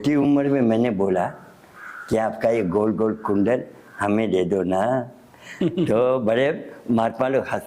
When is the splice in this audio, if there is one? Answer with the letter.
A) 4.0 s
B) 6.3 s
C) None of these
C